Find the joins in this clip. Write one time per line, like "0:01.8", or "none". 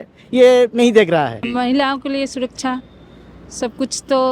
0:01.5